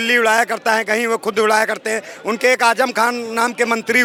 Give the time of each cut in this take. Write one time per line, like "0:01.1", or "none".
none